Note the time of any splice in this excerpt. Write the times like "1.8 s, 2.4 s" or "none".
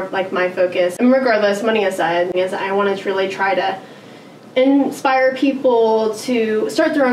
0.9 s, 2.3 s